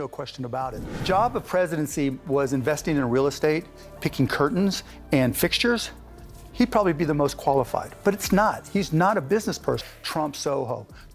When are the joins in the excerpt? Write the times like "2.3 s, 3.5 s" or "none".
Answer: 1.0 s, 9.9 s